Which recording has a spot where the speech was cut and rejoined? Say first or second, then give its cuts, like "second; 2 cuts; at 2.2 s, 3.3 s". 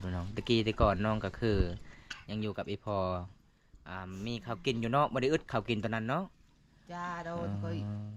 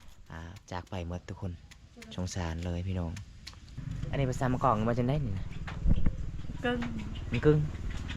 second; 1 cut; at 3.8 s